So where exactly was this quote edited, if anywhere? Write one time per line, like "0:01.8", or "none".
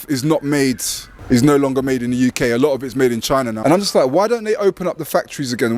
0:01.1
0:03.6